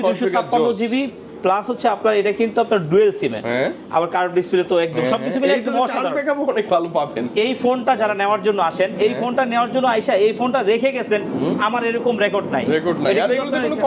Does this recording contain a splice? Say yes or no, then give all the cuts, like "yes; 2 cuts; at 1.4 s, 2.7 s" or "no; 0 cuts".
no; 0 cuts